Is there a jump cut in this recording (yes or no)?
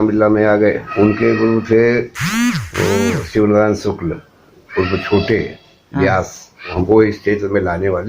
yes